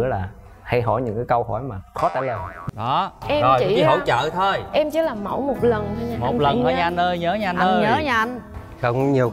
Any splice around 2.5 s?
yes; 1 cut; at 2.5 s

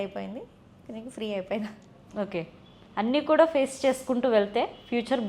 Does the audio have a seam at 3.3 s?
no; 1 cut; at 2.0 s

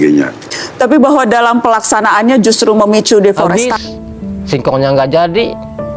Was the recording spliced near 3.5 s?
yes; 1 cut; at 3.5 s

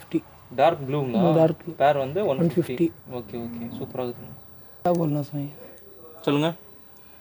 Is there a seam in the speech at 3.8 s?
no; 0 cuts

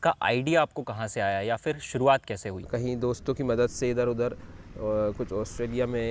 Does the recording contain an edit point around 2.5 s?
yes; 1 cut; at 2.5 s

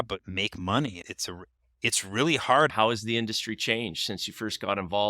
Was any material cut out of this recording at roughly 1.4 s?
no; 1 cut; at 2.7 s

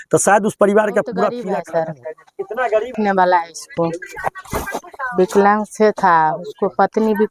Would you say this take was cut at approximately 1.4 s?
yes; 1 cut; at 1.4 s

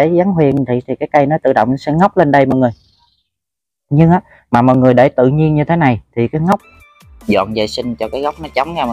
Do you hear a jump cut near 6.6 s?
yes; 1 cut; at 6.6 s

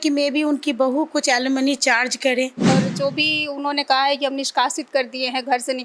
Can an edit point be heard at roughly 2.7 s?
yes; 1 cut; at 2.7 s

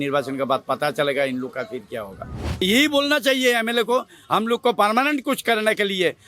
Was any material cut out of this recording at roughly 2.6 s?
yes; 1 cut; at 2.6 s

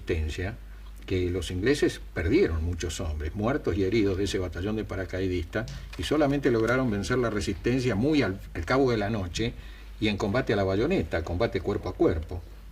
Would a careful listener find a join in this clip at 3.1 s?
no; 1 cut; at 7.0 s

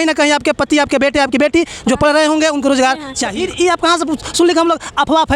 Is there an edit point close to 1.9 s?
no; 1 cut; at 3.3 s

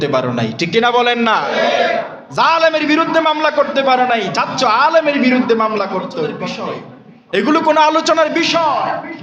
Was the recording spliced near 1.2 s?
no; 1 cut; at 6.5 s

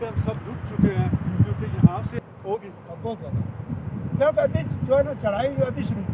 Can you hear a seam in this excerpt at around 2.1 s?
yes; 1 cut; at 2.1 s

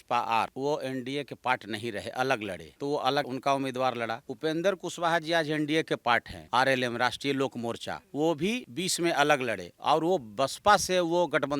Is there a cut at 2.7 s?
no; 0 cuts

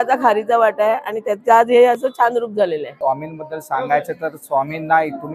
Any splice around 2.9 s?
yes; 1 cut; at 2.9 s

